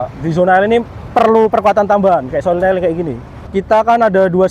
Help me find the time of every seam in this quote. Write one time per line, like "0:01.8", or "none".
0:03.5